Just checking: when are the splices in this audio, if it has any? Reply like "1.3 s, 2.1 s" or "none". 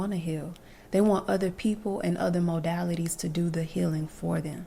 none